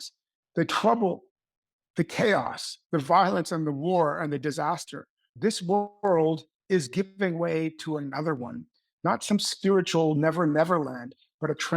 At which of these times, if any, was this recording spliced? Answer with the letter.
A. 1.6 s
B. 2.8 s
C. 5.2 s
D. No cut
C